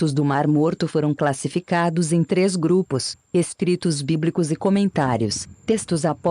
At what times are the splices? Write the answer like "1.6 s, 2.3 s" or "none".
1.1 s